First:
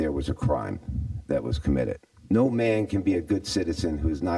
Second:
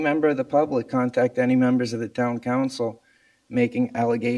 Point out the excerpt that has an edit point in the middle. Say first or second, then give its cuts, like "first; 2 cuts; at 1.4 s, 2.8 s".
first; 1 cut; at 2.1 s